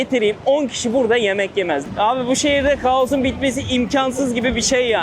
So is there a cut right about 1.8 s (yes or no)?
yes